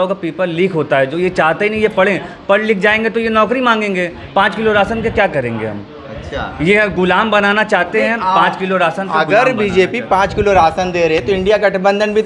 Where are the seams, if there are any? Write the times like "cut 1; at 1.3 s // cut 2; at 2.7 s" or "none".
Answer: none

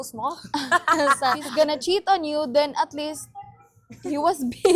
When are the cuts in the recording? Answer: cut 1; at 1.4 s

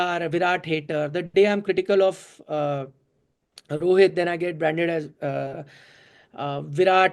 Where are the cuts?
none

